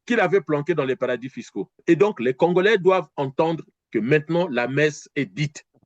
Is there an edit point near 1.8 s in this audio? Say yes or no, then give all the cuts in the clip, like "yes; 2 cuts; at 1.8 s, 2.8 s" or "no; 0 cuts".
yes; 1 cut; at 1.8 s